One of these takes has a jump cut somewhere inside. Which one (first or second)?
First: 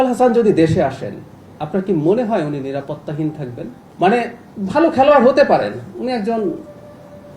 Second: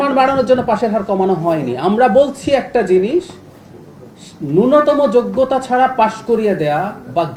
first